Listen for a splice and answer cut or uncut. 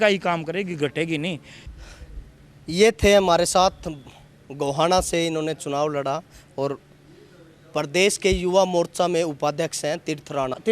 uncut